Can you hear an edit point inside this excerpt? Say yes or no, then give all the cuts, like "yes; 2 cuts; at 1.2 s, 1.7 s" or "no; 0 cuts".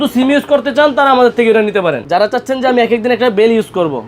yes; 1 cut; at 2.0 s